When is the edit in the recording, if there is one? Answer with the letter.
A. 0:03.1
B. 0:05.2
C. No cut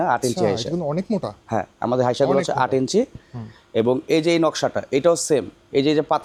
C